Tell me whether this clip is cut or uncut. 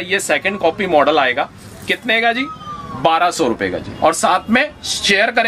uncut